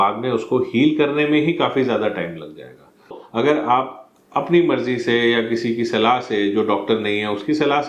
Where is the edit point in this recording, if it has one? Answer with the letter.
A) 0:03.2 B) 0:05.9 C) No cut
A